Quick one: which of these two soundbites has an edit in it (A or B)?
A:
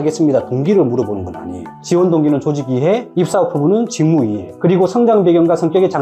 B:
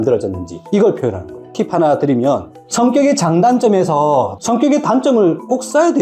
B